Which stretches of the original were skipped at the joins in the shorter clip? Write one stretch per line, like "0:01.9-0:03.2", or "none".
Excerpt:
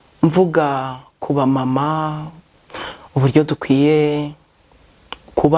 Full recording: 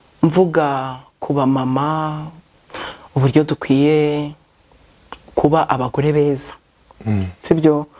none

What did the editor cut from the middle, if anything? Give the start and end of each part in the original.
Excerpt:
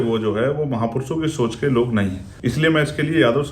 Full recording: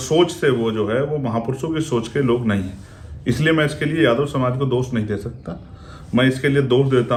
0:02.8-0:03.1

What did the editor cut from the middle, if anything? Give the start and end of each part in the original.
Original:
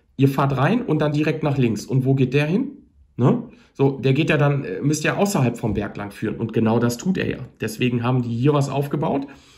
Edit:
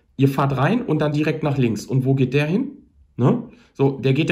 none

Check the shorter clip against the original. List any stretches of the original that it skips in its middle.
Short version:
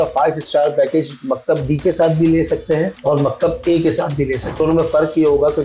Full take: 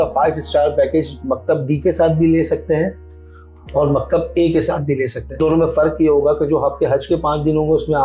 0:02.9-0:03.6
0:05.2-0:05.3

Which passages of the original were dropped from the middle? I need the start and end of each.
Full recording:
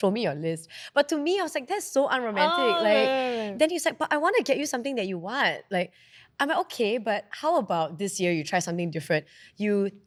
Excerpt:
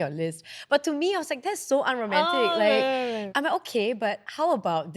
0:03.5-0:06.3

